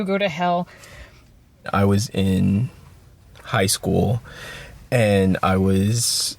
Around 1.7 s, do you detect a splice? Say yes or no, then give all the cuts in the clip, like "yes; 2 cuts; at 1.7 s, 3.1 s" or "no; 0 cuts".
yes; 1 cut; at 1.7 s